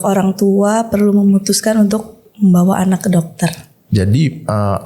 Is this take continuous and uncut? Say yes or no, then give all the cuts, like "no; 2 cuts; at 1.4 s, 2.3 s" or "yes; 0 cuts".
yes; 0 cuts